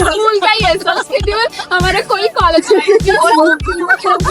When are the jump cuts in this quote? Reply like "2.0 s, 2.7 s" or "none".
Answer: none